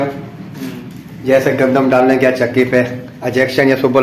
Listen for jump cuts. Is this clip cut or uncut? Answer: uncut